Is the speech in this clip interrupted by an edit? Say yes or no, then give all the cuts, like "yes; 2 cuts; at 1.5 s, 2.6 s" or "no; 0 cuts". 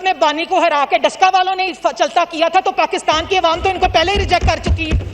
no; 0 cuts